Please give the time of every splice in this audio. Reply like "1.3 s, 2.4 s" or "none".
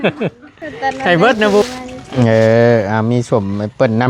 1.6 s